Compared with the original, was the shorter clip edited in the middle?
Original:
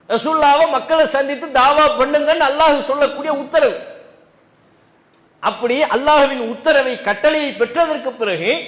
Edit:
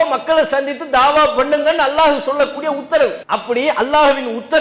yes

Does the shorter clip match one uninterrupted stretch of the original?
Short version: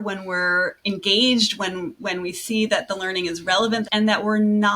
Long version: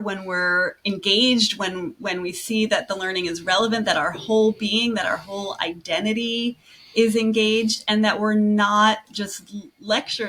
no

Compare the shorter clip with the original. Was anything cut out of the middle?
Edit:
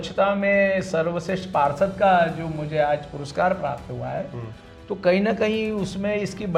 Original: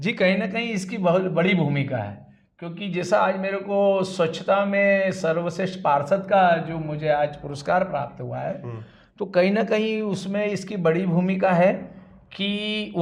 no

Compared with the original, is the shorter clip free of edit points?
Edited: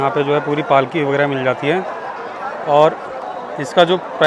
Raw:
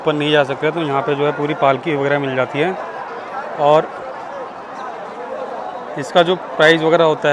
no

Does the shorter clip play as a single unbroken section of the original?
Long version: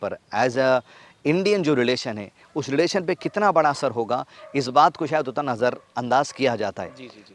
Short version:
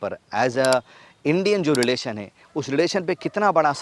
yes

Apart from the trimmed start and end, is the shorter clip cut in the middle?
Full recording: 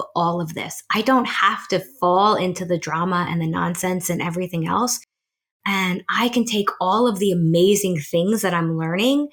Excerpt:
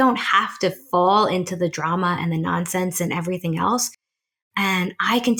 no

